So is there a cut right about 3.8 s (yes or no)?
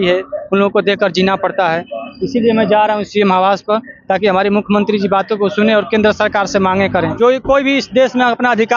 no